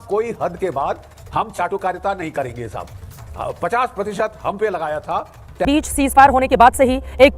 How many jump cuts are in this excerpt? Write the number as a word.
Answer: one